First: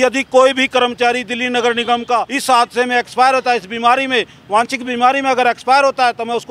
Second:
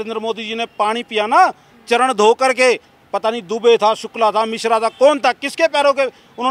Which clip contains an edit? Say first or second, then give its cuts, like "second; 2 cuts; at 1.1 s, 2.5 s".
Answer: first; 1 cut; at 2.3 s